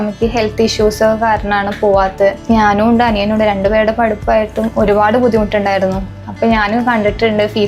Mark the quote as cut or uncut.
cut